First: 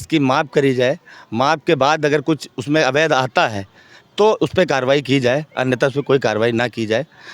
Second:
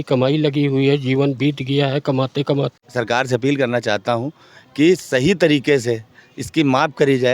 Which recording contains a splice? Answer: second; 1 cut; at 2.8 s

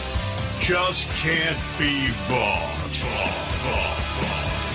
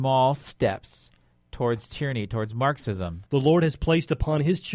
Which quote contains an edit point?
second; 1 cut; at 3.1 s

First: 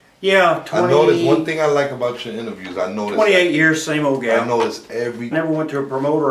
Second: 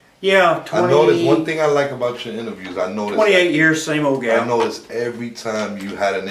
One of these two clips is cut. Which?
second; 1 cut; at 5.3 s

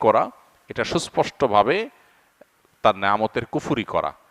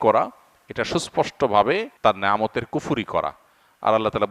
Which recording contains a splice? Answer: second; 1 cut; at 1.9 s

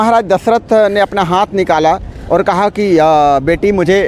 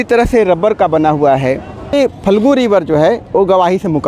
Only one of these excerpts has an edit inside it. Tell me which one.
second; 1 cut; at 1.9 s

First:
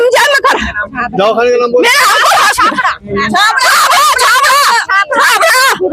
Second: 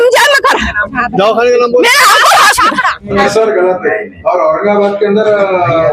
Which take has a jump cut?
second; 1 cut; at 3.2 s

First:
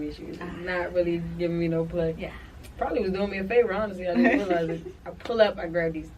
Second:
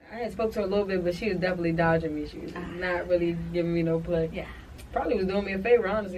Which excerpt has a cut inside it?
first; 1 cut; at 5.0 s

